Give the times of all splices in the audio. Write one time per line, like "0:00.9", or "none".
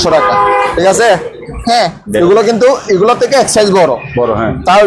0:01.5

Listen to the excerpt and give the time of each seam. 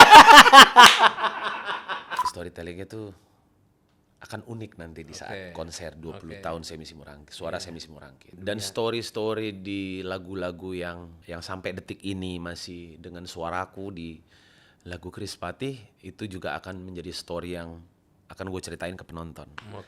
0:02.3
0:08.4
0:11.2

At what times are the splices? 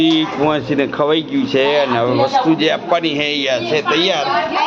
none

